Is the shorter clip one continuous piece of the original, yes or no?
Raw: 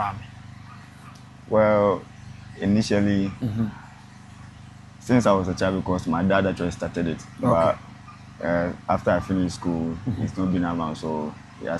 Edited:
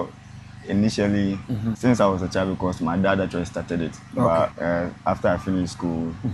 no